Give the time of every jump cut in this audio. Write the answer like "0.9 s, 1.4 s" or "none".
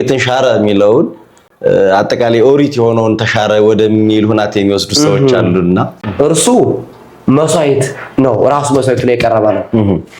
6.0 s